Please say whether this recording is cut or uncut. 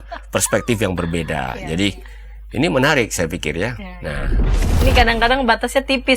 cut